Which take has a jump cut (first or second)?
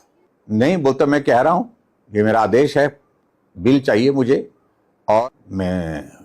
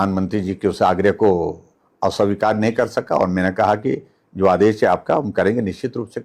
first